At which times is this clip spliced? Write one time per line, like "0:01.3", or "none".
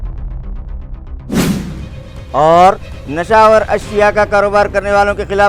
0:01.6